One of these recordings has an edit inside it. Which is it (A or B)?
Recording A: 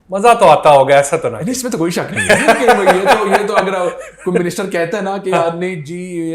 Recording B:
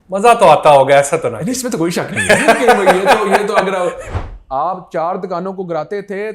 B